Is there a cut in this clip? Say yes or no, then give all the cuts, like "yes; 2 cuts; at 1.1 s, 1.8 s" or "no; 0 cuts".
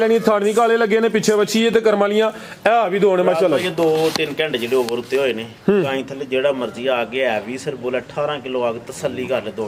no; 0 cuts